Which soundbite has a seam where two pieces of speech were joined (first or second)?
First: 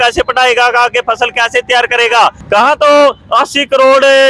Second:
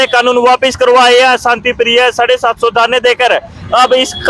first